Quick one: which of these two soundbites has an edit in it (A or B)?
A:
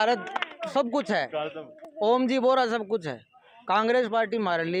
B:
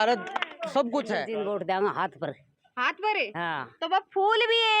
B